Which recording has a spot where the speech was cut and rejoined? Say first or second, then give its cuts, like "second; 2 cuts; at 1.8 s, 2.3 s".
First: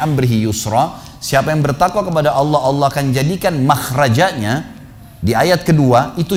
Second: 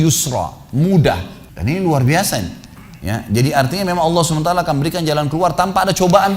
second; 1 cut; at 1.3 s